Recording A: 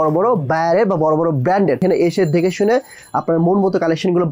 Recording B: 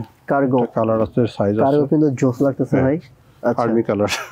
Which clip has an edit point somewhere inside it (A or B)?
A